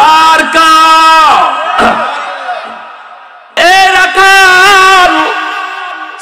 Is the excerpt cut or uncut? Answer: cut